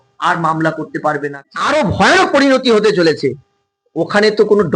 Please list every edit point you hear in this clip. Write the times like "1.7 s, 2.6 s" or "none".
1.3 s

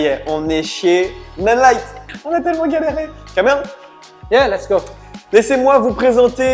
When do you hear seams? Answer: none

